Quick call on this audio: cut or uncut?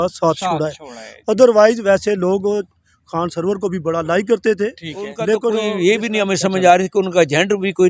cut